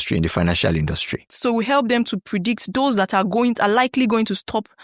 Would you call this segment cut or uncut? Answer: cut